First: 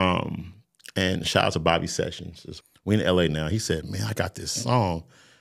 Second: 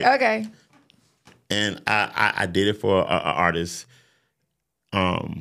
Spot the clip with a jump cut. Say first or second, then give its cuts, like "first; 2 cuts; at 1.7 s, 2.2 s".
first; 1 cut; at 2.5 s